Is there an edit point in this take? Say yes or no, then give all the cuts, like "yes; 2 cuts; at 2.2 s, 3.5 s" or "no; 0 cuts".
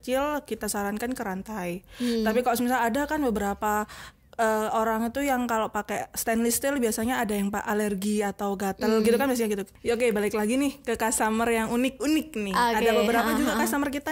yes; 1 cut; at 9.7 s